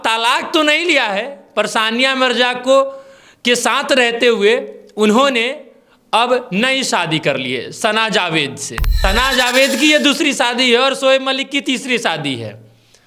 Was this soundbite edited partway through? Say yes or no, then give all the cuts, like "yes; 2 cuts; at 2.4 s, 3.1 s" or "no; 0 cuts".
yes; 1 cut; at 9.0 s